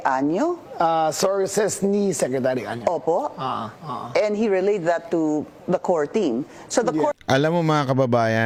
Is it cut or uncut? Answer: uncut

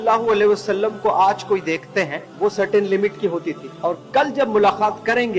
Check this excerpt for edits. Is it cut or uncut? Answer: cut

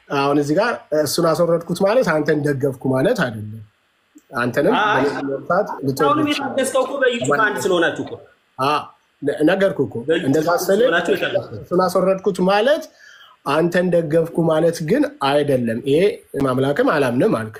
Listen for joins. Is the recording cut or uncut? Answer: cut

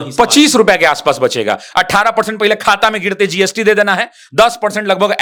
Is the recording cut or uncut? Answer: uncut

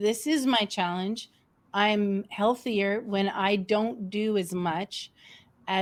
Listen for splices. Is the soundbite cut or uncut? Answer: uncut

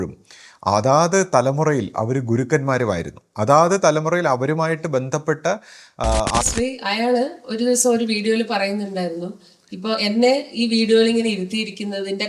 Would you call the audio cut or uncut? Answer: cut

